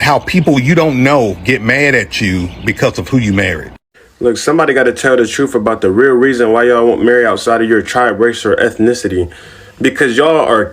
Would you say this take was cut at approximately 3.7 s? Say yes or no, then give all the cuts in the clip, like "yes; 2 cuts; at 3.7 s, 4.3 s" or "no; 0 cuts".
yes; 1 cut; at 3.7 s